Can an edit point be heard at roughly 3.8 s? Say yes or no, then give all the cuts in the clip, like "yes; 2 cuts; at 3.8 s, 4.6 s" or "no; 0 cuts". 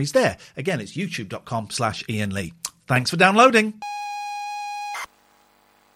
yes; 1 cut; at 3.8 s